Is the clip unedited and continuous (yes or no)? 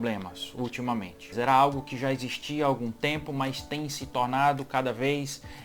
no